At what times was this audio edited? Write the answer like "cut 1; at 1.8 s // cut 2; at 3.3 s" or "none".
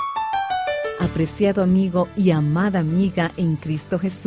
cut 1; at 0.9 s